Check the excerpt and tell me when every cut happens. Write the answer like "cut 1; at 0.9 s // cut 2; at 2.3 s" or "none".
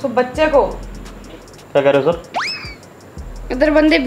cut 1; at 1.3 s

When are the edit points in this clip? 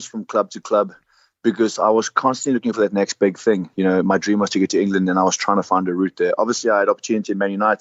none

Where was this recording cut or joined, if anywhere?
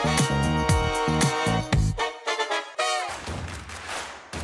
cut 1; at 3.2 s

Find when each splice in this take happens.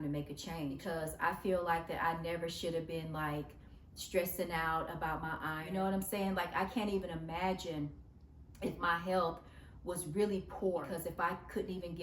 cut 1; at 0.8 s // cut 2; at 5.6 s // cut 3; at 10.9 s

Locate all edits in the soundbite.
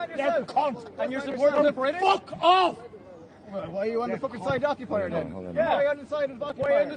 none

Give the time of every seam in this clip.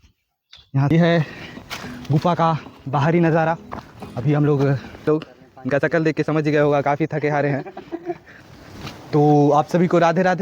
cut 1; at 0.9 s // cut 2; at 5.1 s // cut 3; at 8.4 s

